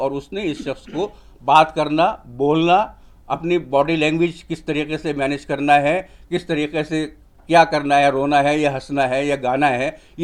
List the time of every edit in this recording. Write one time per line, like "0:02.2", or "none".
none